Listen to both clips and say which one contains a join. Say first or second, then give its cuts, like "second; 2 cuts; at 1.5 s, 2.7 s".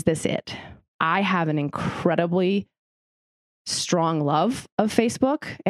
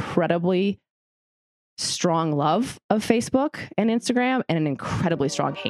first; 1 cut; at 0.9 s